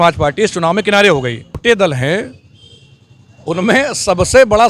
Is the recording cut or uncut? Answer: cut